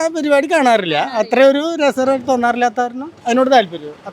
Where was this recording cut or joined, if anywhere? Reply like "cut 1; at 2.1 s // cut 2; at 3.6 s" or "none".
cut 1; at 3.2 s